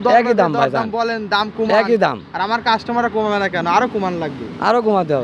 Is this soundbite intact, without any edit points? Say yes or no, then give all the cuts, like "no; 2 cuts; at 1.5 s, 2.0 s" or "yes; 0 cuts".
yes; 0 cuts